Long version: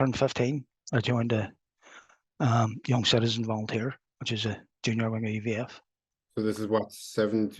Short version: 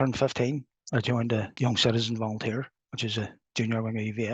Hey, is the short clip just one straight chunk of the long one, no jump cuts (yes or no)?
no